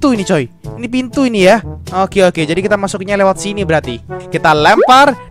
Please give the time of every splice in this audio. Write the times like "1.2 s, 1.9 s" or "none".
4.2 s

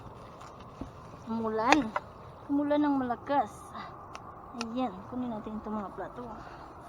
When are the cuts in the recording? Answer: none

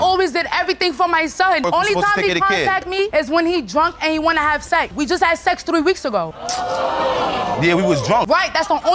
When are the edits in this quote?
1.6 s, 4.9 s

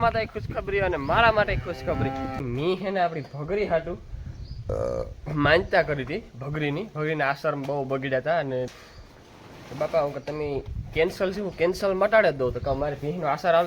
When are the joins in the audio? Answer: 2.4 s, 8.8 s

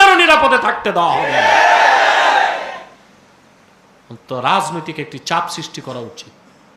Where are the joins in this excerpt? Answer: none

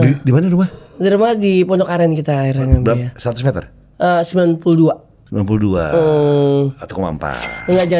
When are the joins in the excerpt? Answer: none

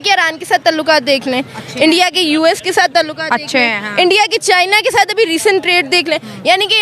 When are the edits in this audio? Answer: none

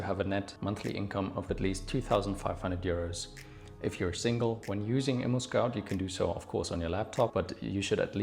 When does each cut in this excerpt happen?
4.6 s

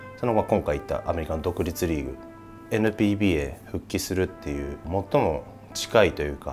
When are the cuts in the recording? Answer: 2.6 s, 4.8 s

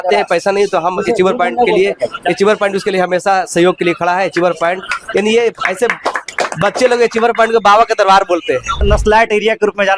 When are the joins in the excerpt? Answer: 8.8 s

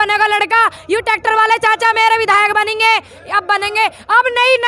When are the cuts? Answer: none

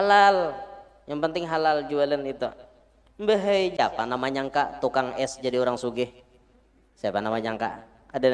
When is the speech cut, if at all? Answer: 3.8 s

